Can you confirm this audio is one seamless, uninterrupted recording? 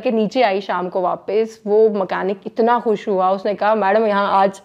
yes; 0 cuts

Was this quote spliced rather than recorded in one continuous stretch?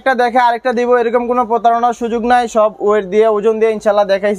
no; 0 cuts

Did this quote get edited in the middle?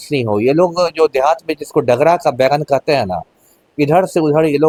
no; 0 cuts

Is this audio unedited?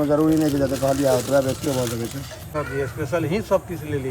no; 1 cut; at 2.5 s

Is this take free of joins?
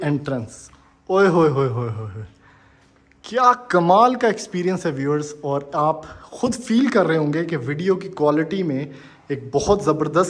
yes; 0 cuts

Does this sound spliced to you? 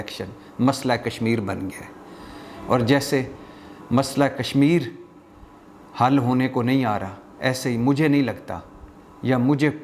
no; 0 cuts

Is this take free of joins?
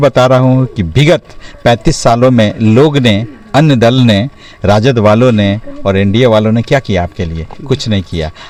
yes; 0 cuts

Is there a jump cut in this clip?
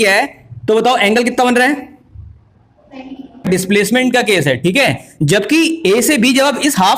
yes; 1 cut; at 3.5 s

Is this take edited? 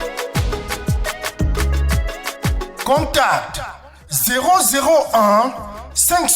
yes; 1 cut; at 2.6 s

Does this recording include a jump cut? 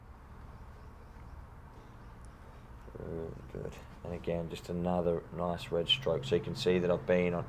no; 0 cuts

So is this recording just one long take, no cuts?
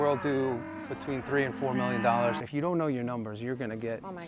no; 1 cut; at 2.4 s

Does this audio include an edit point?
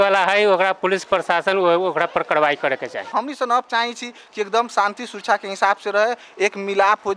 yes; 1 cut; at 3.0 s

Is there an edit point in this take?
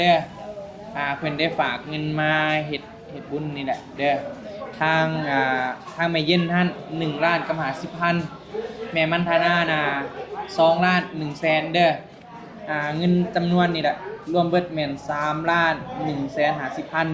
no; 0 cuts

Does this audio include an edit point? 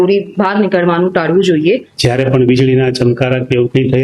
yes; 1 cut; at 1.9 s

